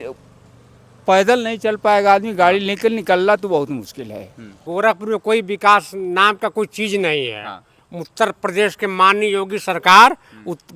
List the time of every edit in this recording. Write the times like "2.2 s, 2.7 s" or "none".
4.6 s